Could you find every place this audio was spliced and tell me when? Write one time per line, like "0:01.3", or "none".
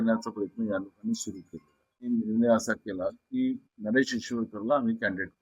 0:02.1